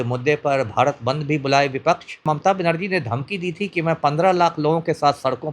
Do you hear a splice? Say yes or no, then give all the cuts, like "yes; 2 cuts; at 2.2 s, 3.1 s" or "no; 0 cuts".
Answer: yes; 1 cut; at 2.2 s